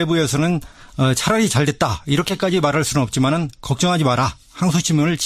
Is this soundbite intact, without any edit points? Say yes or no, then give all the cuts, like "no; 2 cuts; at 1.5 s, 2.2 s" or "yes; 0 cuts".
no; 1 cut; at 1.9 s